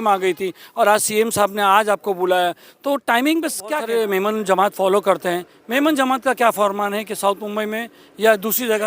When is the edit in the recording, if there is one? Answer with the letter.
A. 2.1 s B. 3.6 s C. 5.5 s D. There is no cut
B